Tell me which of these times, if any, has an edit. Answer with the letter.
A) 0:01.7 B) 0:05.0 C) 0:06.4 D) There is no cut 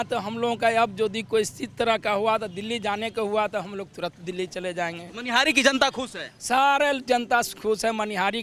D